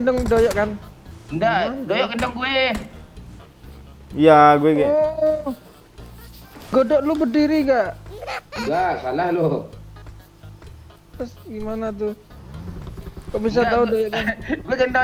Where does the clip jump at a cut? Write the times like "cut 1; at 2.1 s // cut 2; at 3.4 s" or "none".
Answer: none